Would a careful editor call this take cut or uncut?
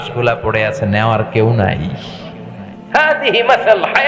uncut